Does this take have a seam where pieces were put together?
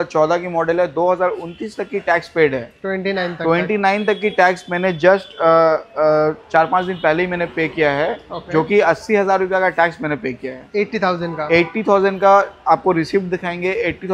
no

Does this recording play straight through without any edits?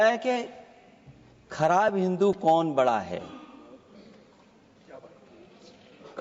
yes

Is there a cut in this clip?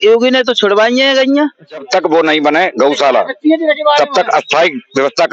yes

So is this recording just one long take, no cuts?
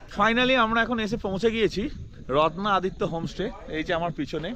yes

